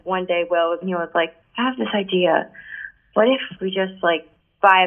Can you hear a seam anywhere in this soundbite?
yes; 2 cuts; at 0.8 s, 3.5 s

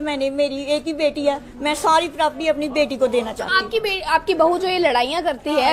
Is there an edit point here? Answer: no; 0 cuts

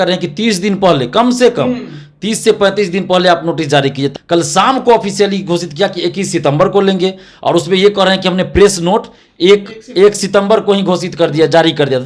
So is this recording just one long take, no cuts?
no; 1 cut; at 4.1 s

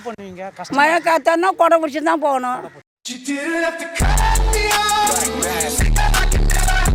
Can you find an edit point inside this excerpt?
no; 0 cuts

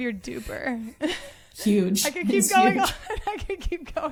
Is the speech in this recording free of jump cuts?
yes; 0 cuts

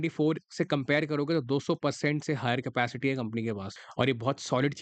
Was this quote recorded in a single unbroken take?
no; 1 cut; at 3.7 s

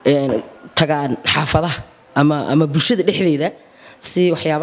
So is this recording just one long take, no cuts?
yes; 0 cuts

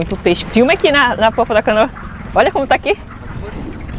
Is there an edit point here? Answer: no; 0 cuts

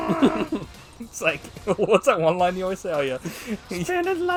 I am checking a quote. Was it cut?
no; 0 cuts

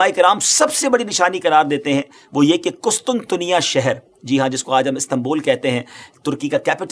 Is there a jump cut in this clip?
no; 0 cuts

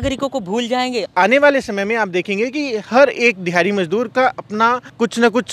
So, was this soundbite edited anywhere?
yes; 1 cut; at 1.1 s

